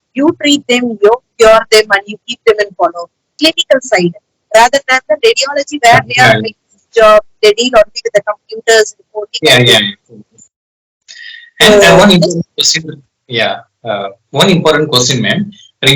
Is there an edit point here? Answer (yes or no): no